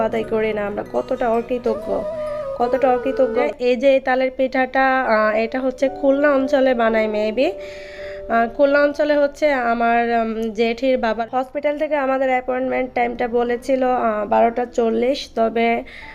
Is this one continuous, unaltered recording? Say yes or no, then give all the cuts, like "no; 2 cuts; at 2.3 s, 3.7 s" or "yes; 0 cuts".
no; 2 cuts; at 3.5 s, 11.2 s